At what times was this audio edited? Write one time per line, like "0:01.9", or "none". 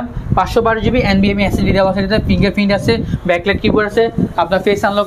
none

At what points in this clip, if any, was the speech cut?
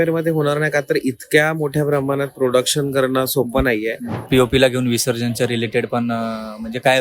0:04.3

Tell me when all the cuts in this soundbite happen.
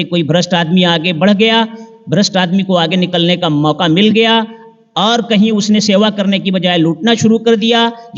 none

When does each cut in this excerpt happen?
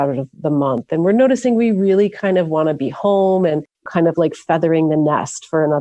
0:03.9

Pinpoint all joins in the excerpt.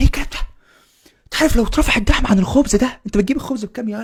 none

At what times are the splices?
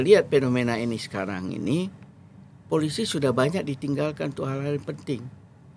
none

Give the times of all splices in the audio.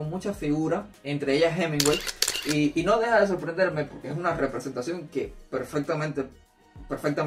none

